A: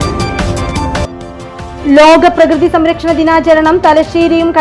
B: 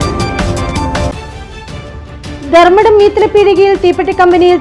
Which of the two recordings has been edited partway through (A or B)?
A